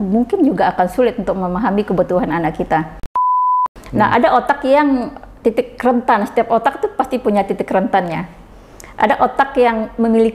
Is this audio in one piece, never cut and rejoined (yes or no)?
no